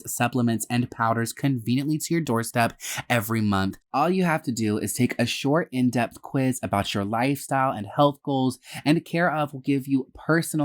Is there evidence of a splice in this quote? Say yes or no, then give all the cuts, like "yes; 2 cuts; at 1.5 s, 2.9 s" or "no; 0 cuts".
yes; 1 cut; at 3.8 s